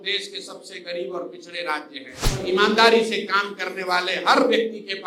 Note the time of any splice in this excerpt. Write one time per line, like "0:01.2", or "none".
0:02.5